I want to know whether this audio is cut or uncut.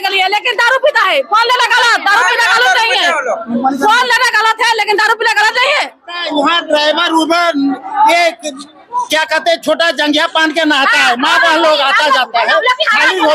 cut